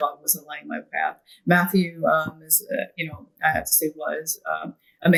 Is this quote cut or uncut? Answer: uncut